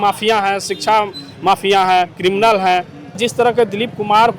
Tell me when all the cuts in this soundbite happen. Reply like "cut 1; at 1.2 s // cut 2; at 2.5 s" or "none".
cut 1; at 3.2 s